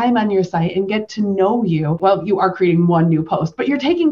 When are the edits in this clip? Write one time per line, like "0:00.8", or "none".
0:02.0